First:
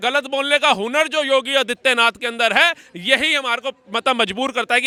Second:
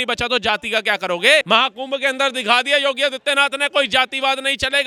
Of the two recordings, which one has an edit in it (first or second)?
second